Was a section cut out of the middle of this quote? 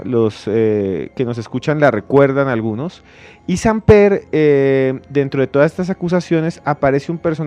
no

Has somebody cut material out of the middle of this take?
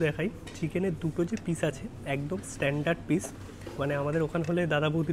no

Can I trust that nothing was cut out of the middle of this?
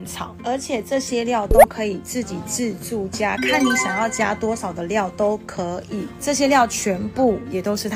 no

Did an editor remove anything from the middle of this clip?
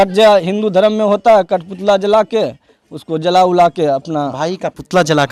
no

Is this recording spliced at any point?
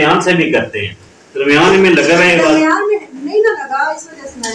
no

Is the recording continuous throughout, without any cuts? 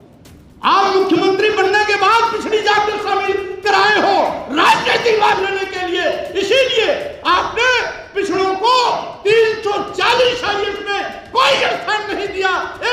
yes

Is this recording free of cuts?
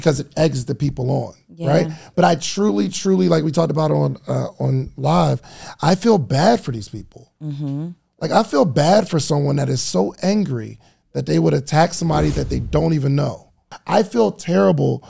no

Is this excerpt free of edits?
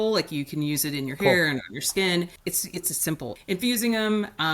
no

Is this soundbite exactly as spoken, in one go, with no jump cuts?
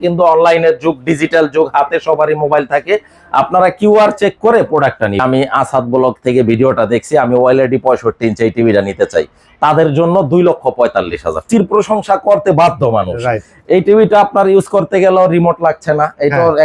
no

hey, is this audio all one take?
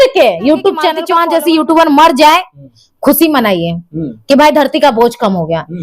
no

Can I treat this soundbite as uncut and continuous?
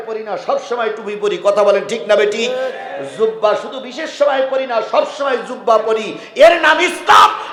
yes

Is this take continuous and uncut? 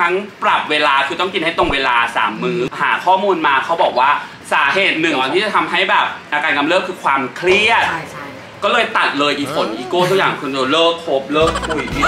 no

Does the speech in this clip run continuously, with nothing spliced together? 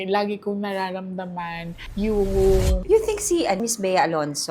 no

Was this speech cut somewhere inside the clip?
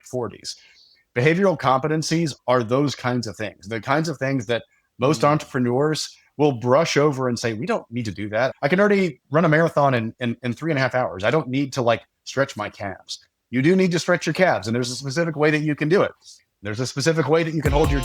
yes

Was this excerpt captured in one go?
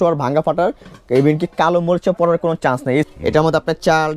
no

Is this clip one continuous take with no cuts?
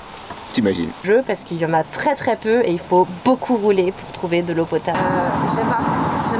no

